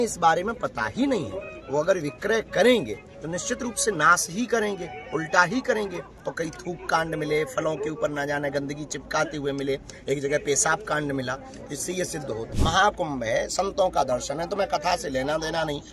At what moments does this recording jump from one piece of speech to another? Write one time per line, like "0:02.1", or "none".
0:12.4